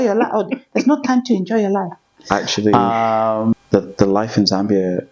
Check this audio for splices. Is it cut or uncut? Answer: cut